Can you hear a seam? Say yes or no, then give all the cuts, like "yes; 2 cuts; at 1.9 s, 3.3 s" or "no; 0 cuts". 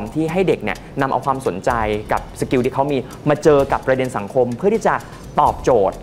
no; 0 cuts